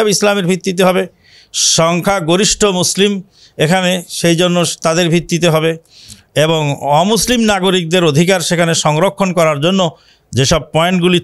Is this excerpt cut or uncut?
uncut